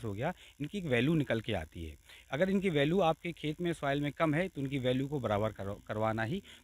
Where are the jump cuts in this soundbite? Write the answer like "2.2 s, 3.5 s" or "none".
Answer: none